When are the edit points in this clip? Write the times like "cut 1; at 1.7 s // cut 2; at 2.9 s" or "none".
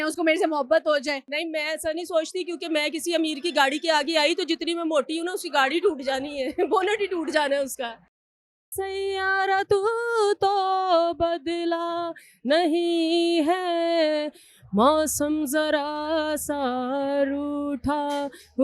cut 1; at 1.3 s // cut 2; at 8.3 s